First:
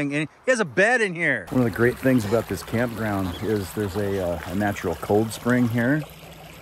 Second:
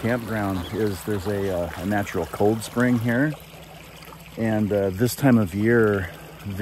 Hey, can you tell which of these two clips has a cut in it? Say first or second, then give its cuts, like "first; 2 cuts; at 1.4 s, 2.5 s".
first; 1 cut; at 1.4 s